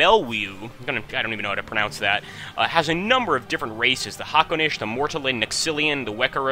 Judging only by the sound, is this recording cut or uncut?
uncut